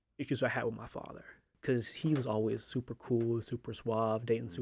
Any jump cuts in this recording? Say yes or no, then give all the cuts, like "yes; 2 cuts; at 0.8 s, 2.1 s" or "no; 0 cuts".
yes; 1 cut; at 1.5 s